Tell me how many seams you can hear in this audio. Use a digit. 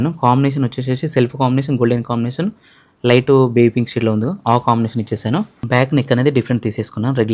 1